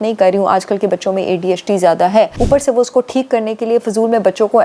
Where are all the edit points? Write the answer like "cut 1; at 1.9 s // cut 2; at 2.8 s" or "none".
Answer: cut 1; at 2.4 s